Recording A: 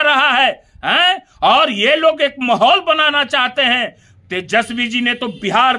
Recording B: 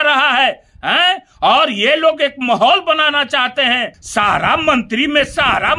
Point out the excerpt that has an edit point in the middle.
B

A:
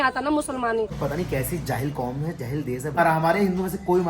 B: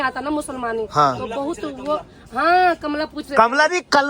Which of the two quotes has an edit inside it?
A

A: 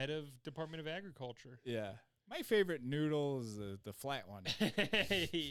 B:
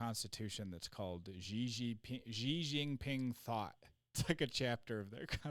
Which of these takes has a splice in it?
B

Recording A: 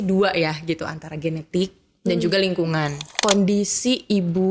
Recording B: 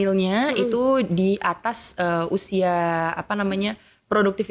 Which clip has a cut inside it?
A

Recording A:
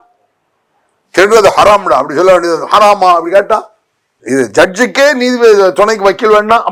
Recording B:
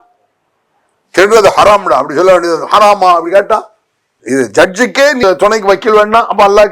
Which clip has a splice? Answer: B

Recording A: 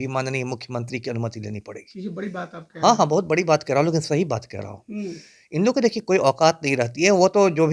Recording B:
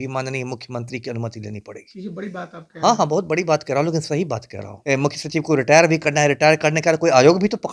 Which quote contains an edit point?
B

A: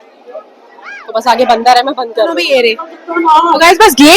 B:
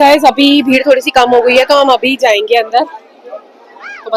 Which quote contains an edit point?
A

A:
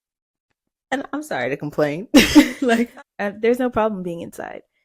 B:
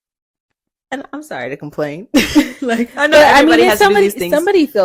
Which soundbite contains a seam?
A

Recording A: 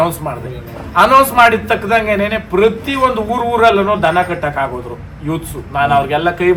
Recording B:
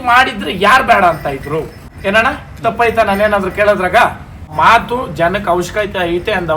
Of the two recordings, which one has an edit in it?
B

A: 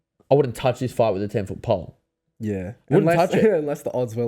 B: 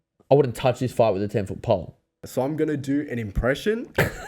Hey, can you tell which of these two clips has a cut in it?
B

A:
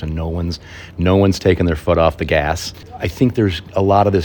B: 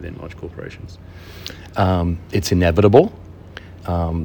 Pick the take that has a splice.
A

